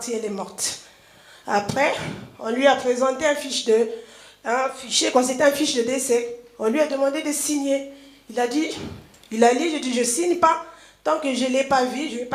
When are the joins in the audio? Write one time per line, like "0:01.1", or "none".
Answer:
none